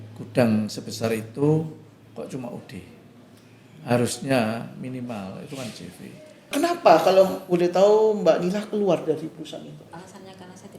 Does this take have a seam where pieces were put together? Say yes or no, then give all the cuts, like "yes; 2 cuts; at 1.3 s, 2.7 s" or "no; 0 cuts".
yes; 2 cuts; at 6.5 s, 9.9 s